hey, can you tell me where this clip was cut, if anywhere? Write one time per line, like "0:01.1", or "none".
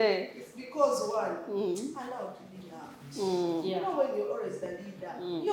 none